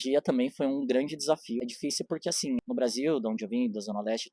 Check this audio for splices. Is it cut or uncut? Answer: cut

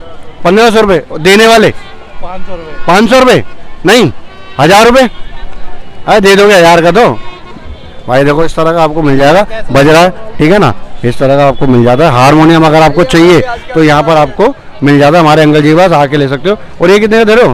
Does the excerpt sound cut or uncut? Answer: uncut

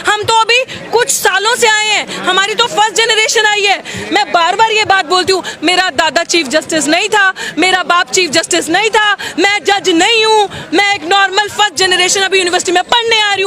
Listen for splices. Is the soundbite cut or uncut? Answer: uncut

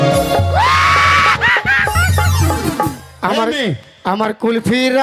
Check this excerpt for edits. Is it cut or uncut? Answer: cut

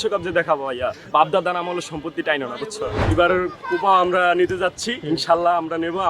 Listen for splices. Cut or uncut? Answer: cut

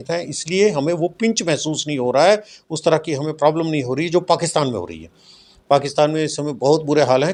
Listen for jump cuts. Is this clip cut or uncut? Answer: uncut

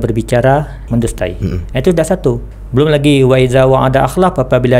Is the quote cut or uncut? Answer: cut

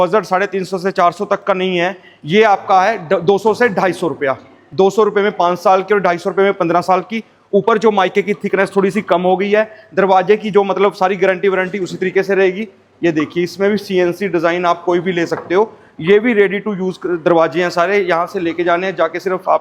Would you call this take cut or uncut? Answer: uncut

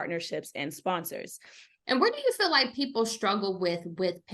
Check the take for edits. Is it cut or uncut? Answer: cut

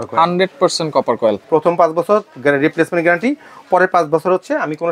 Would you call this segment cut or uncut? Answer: cut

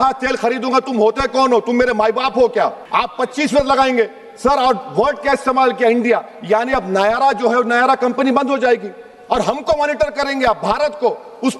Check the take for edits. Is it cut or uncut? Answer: cut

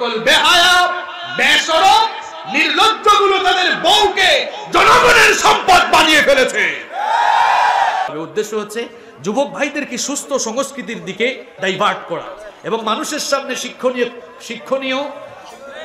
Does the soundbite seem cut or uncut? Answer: cut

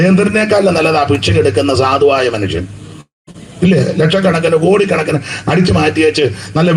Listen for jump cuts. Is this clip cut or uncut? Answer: uncut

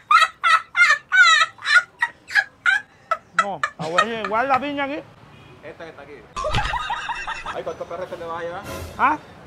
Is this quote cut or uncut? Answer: uncut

